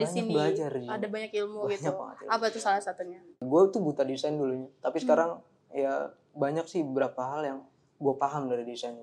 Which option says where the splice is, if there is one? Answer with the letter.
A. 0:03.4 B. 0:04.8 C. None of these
A